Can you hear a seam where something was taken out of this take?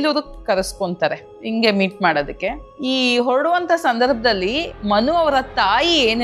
yes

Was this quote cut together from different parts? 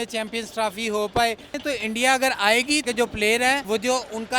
yes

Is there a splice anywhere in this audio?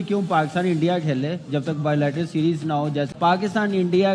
yes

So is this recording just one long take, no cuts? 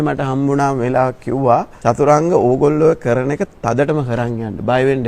no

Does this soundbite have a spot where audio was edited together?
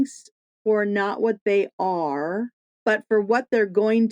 yes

